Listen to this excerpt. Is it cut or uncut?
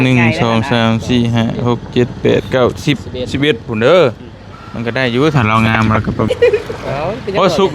cut